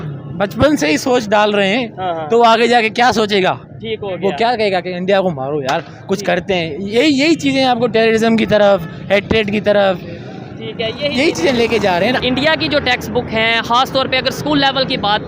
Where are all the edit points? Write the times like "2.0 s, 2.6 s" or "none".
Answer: 12.2 s